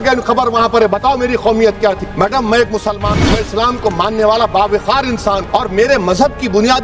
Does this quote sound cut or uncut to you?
uncut